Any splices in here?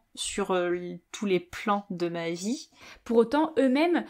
yes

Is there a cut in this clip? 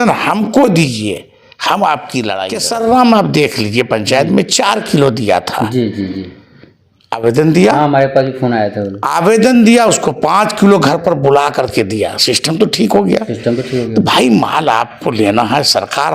yes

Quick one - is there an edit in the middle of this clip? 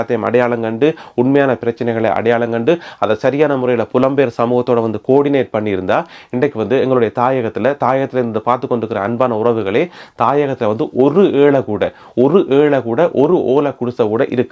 no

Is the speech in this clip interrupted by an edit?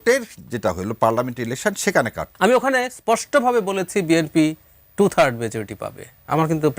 yes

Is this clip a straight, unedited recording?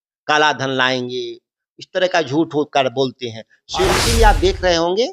no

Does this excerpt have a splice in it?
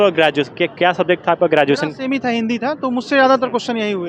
no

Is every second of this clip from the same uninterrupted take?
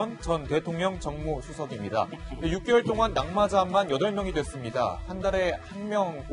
no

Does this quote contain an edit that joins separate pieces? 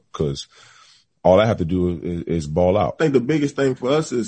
yes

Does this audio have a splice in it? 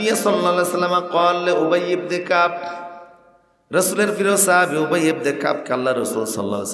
no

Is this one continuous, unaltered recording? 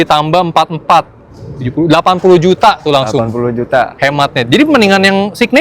yes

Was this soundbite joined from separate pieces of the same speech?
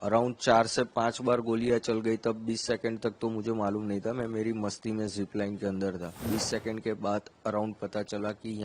yes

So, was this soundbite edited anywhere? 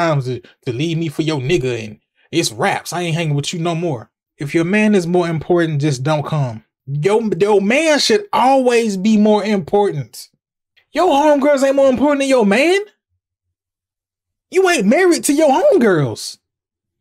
no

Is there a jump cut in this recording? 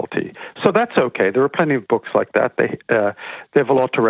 no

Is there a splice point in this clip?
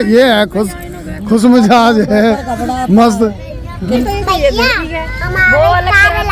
no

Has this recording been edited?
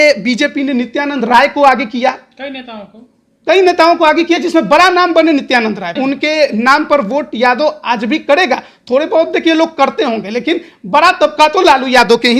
yes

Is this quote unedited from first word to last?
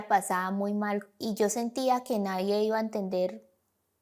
no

